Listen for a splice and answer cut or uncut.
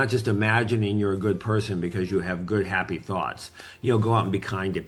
uncut